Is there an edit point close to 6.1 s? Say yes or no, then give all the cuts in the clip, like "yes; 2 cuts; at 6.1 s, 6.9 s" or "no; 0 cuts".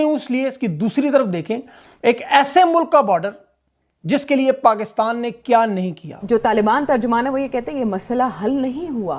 yes; 1 cut; at 6.1 s